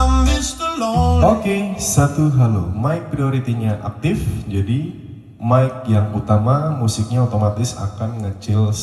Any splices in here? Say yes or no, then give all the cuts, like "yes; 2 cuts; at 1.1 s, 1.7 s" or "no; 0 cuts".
no; 0 cuts